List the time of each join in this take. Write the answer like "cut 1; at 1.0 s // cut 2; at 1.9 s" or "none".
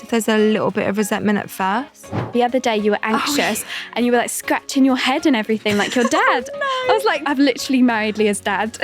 cut 1; at 2.2 s // cut 2; at 7.2 s